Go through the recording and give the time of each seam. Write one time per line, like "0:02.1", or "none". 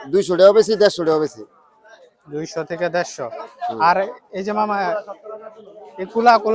none